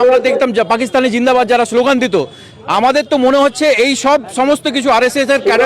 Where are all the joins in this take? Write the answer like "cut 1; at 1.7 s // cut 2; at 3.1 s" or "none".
none